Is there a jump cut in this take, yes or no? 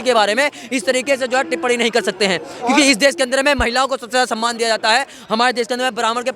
no